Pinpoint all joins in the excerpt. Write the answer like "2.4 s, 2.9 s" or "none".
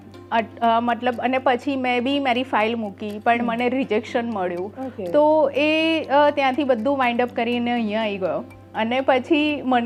none